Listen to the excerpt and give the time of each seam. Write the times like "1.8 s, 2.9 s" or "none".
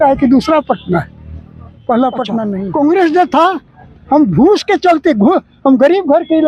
2.5 s